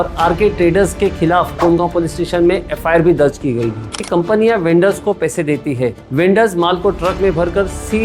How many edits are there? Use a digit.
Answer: 2